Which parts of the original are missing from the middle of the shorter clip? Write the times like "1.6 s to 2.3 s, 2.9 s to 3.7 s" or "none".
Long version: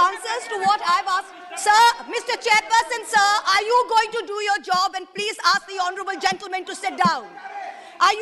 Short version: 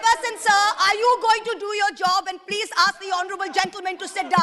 none